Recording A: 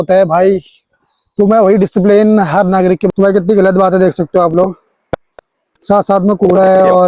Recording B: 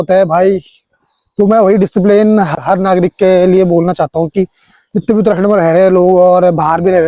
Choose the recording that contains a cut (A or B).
A